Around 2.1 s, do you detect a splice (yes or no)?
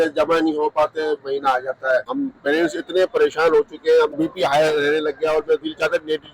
yes